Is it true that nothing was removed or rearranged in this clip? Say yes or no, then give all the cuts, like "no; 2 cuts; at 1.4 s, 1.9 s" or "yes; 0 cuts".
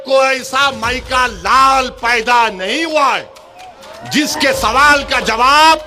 yes; 0 cuts